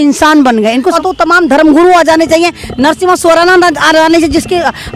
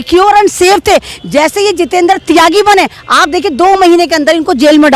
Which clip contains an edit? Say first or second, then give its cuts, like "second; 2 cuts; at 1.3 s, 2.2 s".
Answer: first; 1 cut; at 1.0 s